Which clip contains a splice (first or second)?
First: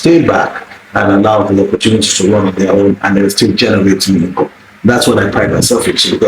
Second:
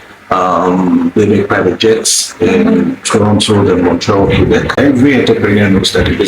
second